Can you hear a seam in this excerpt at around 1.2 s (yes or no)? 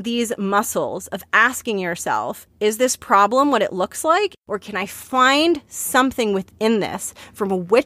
no